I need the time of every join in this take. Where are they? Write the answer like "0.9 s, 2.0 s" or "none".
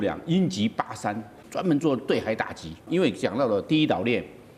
1.4 s, 2.8 s

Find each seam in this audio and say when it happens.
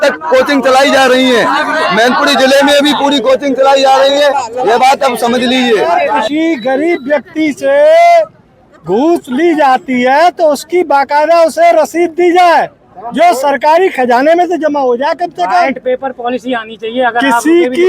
6.2 s

